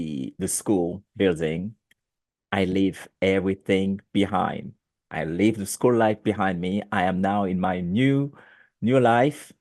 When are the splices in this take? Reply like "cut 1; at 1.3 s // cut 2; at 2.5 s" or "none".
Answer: none